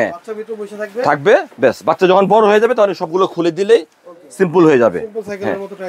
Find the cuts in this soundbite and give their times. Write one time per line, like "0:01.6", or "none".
none